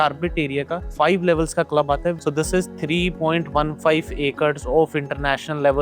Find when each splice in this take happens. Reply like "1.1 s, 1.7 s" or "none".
2.2 s